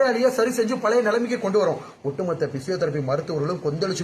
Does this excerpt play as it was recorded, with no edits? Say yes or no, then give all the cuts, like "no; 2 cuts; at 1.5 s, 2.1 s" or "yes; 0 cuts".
no; 1 cut; at 1.9 s